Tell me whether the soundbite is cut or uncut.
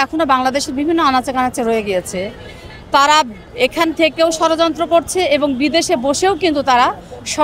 uncut